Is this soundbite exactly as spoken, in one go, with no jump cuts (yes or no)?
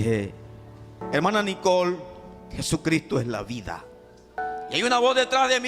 no